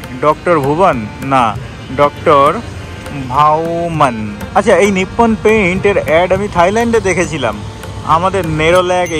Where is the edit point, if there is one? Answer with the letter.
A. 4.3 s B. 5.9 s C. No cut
A